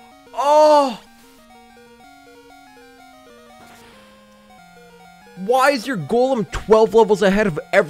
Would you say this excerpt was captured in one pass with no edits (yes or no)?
yes